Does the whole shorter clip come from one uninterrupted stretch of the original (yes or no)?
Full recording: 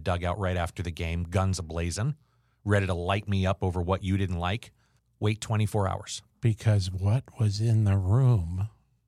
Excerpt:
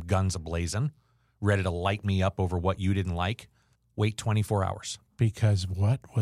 yes